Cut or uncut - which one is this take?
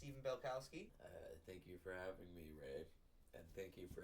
cut